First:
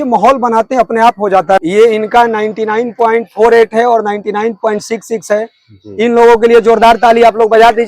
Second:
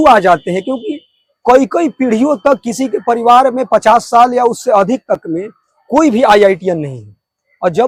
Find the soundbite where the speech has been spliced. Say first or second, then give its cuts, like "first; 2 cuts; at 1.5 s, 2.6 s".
first; 1 cut; at 1.6 s